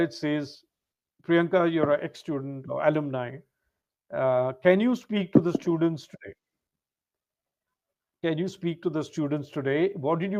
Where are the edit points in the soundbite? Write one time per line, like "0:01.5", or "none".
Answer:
none

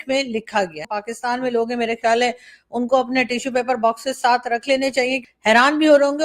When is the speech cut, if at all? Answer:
0:01.0
0:05.2

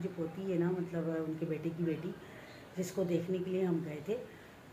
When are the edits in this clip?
none

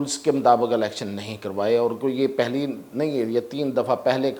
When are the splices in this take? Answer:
none

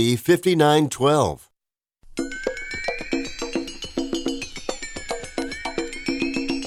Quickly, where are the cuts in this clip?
none

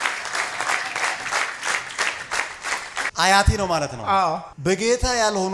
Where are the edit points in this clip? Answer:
0:03.1

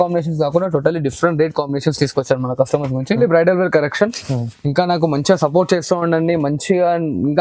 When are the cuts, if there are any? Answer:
0:03.2

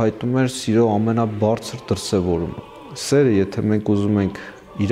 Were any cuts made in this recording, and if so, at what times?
0:02.6

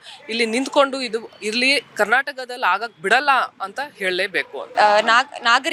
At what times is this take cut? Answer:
none

